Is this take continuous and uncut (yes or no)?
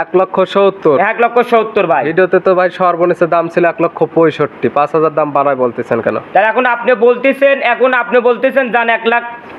yes